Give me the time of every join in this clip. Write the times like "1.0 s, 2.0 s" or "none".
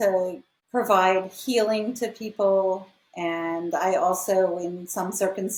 none